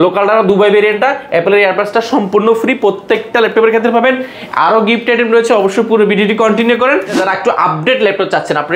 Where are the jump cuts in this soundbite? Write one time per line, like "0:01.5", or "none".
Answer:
0:07.2